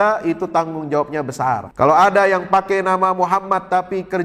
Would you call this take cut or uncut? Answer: cut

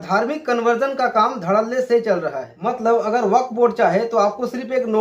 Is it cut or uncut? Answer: cut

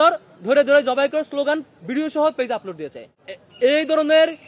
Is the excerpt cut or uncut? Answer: cut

